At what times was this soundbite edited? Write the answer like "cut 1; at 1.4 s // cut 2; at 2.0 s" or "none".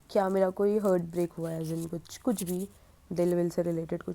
none